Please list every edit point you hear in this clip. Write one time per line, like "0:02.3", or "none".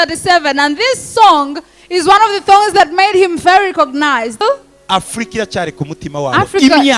0:04.4

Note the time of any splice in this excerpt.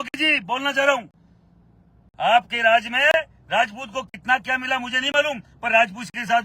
none

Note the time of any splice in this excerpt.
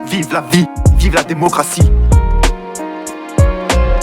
0:03.1

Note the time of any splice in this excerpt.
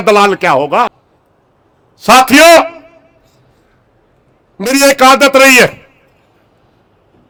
none

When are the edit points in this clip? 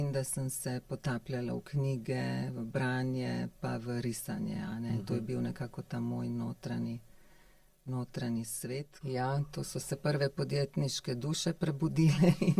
0:08.9

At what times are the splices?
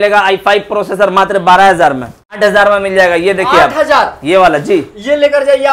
0:02.4

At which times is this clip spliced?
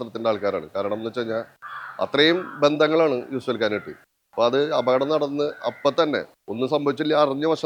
none

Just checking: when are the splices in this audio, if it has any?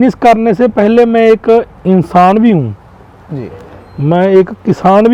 none

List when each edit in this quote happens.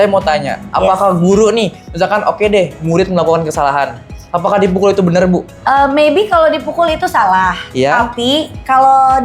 0:05.5

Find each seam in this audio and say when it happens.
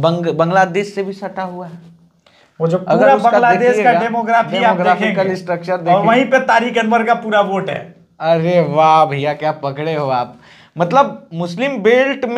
none

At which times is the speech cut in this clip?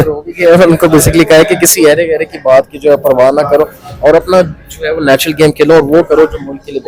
none

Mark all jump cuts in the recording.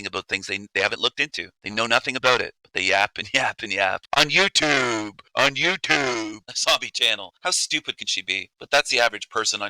0:06.5

